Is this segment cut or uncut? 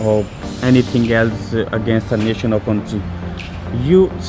uncut